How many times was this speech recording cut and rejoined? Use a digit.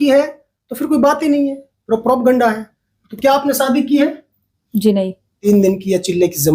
1